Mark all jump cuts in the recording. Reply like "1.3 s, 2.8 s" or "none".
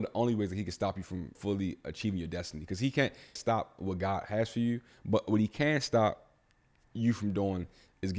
1.4 s, 3.3 s